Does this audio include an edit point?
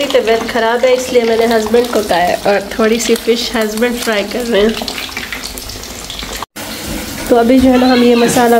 yes; 1 cut; at 6.6 s

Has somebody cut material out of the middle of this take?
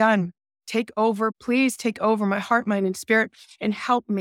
yes; 1 cut; at 1.4 s

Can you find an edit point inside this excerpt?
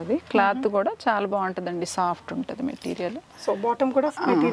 no; 0 cuts

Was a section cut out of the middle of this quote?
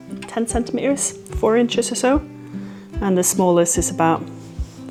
no; 0 cuts

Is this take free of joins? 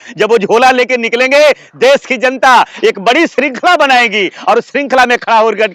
yes; 0 cuts

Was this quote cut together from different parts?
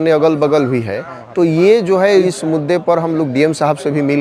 yes; 1 cut; at 2.2 s

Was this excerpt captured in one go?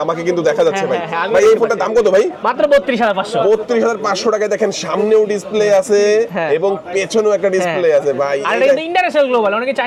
yes; 0 cuts

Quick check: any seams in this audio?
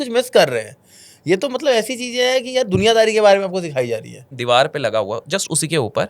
yes; 1 cut; at 4.3 s

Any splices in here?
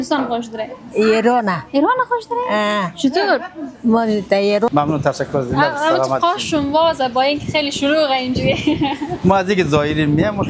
yes; 1 cut; at 4.7 s

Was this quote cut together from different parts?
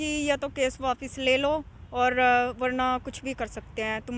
no; 0 cuts

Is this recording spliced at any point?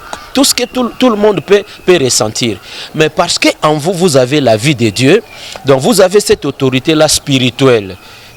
no; 0 cuts

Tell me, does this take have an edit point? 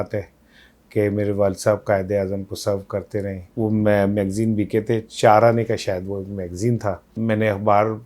yes; 2 cuts; at 3.5 s, 7.2 s

